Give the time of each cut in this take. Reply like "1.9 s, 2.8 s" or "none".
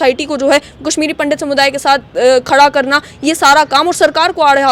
none